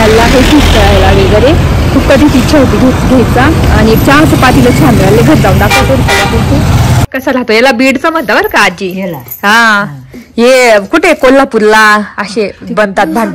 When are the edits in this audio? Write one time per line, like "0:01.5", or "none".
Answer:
0:07.1